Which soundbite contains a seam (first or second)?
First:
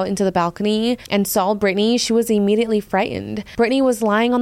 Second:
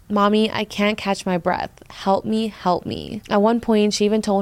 first